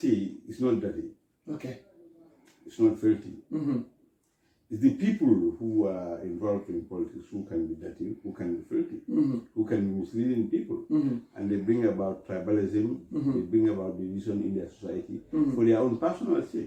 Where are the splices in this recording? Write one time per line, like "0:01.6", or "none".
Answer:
none